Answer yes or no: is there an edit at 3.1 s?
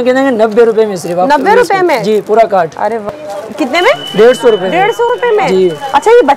yes